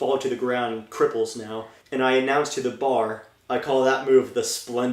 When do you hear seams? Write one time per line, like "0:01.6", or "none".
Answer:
0:01.8